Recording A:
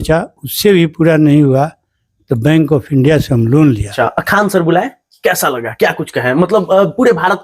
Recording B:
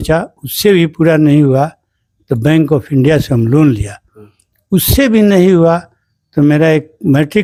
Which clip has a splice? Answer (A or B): A